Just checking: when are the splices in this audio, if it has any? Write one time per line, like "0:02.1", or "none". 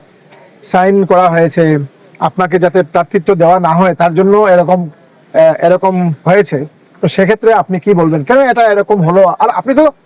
none

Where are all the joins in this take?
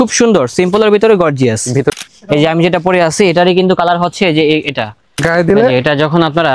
0:01.9
0:05.2

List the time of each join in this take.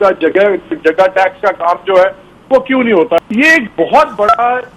0:03.2

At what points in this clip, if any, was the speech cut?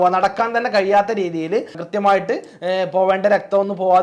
0:01.8

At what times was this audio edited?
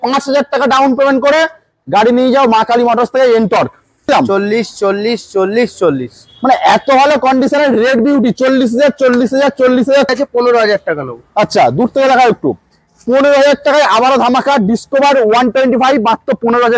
0:04.1
0:10.1

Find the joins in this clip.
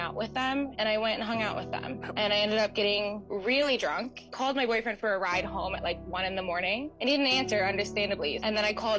0:04.0

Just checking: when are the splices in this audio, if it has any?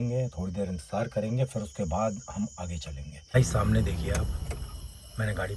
0:03.3

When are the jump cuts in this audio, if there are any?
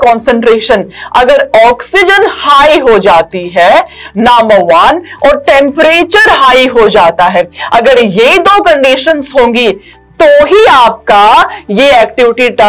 none

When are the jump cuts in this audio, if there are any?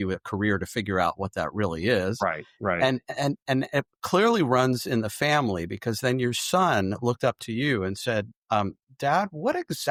none

